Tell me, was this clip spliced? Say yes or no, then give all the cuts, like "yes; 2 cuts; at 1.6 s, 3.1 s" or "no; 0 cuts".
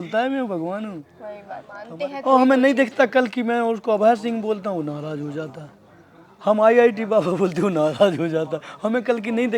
yes; 1 cut; at 1.8 s